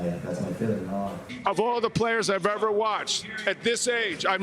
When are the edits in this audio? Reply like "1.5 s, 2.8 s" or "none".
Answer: 1.3 s